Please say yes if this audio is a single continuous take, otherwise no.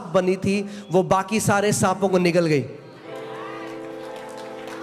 yes